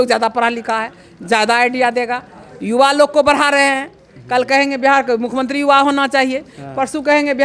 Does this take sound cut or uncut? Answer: uncut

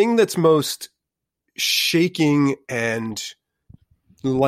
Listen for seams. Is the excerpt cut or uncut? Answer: uncut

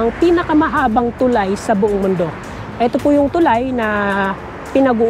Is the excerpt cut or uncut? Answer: uncut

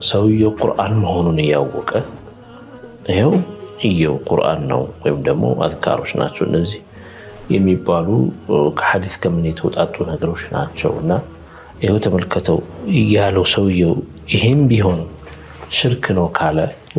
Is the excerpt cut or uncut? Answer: uncut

